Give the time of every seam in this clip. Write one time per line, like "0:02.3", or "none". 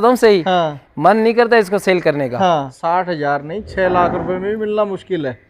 0:02.7